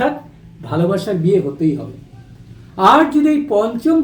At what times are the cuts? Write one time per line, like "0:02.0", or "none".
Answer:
none